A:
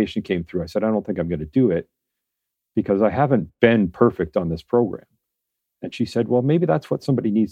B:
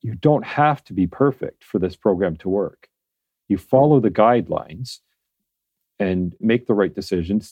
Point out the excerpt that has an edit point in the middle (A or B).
B